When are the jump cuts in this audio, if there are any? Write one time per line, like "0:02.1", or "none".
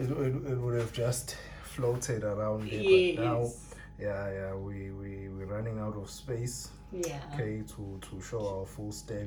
none